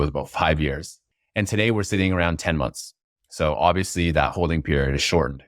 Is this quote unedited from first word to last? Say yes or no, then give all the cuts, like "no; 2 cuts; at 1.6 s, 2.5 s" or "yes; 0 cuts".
no; 1 cut; at 0.9 s